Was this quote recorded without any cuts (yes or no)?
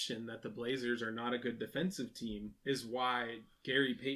no